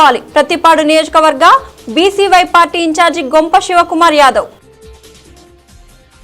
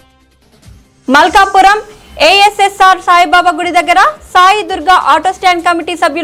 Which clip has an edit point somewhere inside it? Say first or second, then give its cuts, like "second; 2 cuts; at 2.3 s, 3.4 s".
first; 1 cut; at 5.0 s